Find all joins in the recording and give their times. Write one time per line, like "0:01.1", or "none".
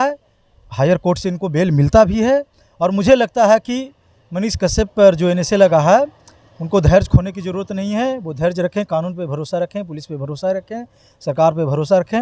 none